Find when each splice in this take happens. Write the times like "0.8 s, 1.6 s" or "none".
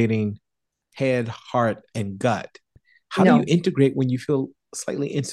2.8 s